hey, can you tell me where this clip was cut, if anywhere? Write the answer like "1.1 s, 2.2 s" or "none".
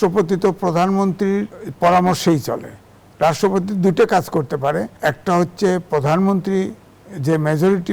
1.6 s, 4.9 s